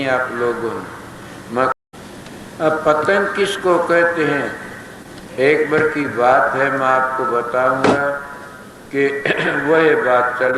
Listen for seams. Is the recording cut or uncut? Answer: cut